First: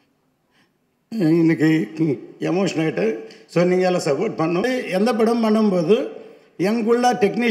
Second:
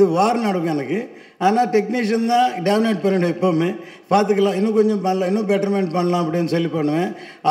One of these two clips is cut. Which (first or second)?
first